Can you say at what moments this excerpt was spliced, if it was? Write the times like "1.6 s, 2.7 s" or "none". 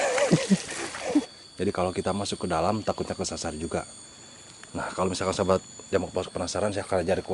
1.0 s